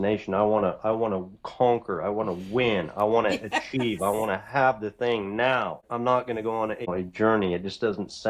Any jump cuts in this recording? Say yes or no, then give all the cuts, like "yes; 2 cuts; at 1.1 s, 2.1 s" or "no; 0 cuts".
yes; 2 cuts; at 5.8 s, 6.9 s